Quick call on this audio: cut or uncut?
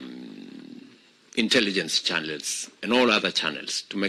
uncut